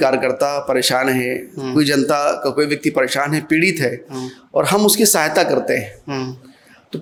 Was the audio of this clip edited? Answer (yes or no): no